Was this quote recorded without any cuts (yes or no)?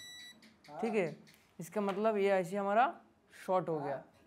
yes